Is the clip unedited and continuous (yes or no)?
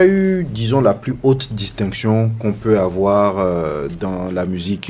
yes